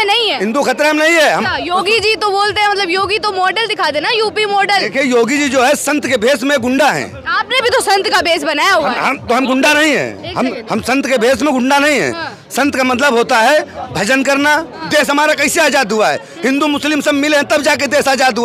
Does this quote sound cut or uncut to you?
cut